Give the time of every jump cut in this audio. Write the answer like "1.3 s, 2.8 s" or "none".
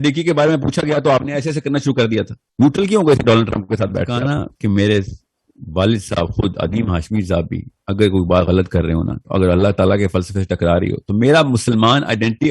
4.2 s

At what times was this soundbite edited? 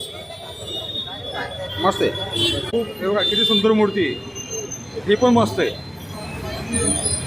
2.7 s

